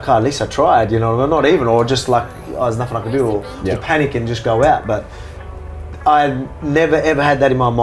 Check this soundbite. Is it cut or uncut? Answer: uncut